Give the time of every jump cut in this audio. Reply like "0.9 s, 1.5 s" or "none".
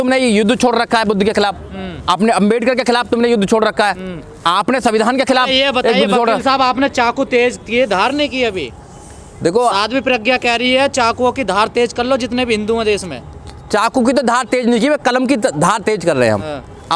none